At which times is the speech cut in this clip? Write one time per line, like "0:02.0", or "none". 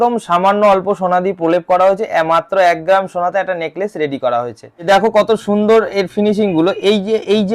0:04.8